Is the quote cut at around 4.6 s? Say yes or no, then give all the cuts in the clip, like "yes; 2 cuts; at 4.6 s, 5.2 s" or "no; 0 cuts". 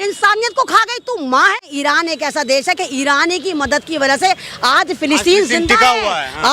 no; 1 cut; at 1.7 s